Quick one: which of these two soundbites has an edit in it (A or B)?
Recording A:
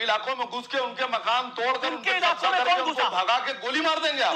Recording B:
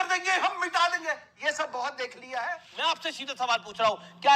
B